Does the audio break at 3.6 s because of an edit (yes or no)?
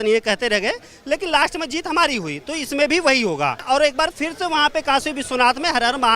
yes